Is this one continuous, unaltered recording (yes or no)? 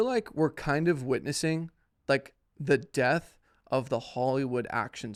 yes